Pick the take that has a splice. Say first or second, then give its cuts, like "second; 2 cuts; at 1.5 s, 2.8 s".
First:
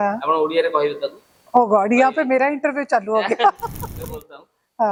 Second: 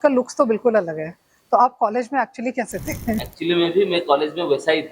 second; 1 cut; at 3.3 s